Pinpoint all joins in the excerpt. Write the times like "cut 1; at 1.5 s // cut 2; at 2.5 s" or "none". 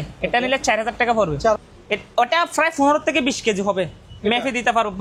cut 1; at 1.6 s